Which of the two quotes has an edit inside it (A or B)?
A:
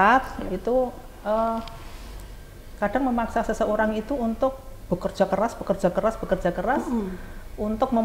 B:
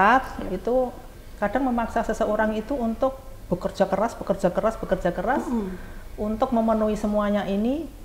B